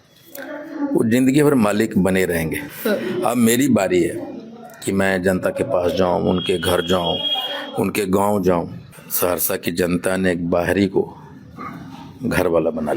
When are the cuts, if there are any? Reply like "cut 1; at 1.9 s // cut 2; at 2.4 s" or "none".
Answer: cut 1; at 2.7 s // cut 2; at 8.8 s